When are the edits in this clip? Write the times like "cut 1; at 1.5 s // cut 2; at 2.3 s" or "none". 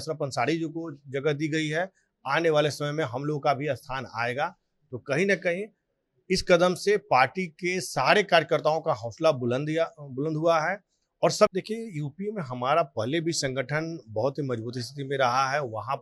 cut 1; at 11.5 s